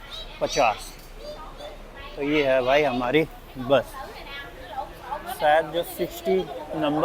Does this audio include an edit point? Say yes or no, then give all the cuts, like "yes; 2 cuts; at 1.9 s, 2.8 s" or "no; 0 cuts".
no; 0 cuts